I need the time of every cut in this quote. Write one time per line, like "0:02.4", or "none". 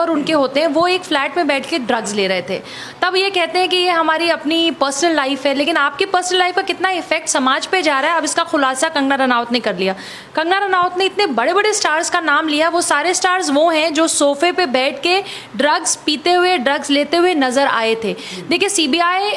none